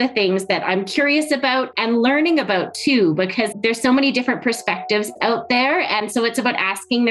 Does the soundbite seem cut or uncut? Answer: cut